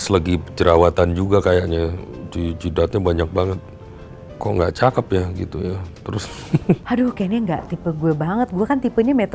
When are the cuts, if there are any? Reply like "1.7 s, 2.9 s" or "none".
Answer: 6.8 s